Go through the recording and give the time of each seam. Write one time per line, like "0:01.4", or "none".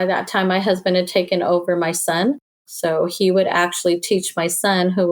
0:02.7

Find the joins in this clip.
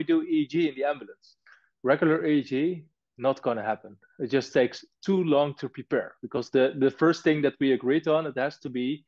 0:01.6

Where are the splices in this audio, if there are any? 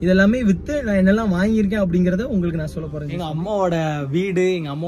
0:03.0

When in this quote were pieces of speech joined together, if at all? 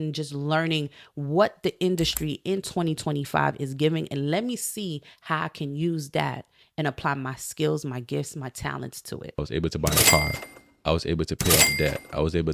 0:09.4

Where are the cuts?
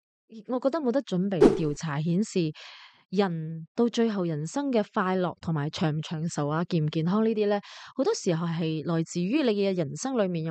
0:01.4

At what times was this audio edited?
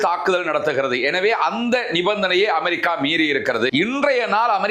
0:03.7

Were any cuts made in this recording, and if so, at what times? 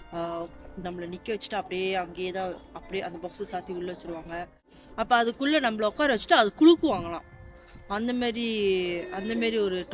0:04.8

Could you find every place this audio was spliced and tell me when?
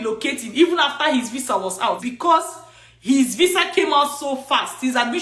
0:02.1

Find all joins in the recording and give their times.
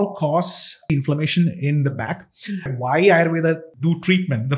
0:00.9
0:02.7
0:03.7

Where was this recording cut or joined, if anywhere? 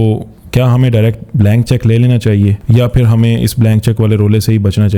0:02.6

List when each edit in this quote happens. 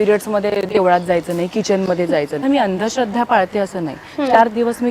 0:02.4

